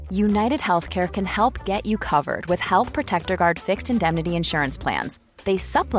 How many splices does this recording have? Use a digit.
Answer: 0